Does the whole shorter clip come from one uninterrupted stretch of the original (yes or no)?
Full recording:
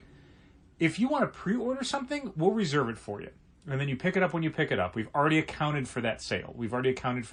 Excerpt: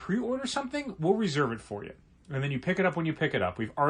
yes